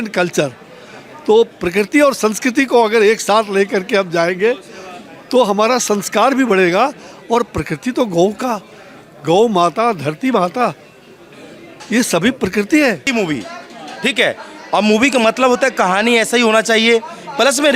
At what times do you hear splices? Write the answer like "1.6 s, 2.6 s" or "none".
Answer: 13.1 s